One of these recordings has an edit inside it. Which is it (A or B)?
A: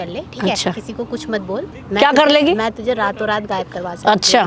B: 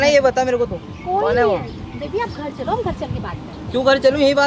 A